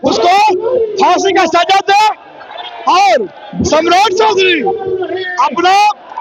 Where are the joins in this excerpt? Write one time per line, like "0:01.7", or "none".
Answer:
none